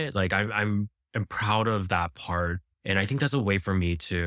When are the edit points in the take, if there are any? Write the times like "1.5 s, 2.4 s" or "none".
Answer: 2.7 s